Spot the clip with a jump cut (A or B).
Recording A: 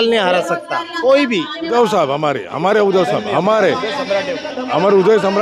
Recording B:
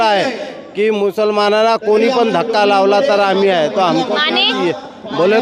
A